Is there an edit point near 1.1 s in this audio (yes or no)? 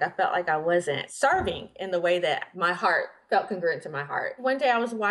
yes